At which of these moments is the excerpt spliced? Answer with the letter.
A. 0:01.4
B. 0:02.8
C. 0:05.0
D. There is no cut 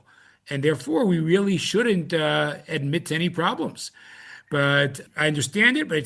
C